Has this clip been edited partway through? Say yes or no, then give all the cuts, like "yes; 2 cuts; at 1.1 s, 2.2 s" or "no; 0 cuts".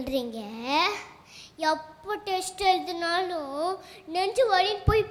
no; 0 cuts